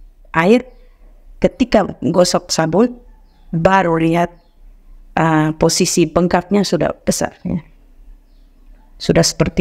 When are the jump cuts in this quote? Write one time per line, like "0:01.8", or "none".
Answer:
none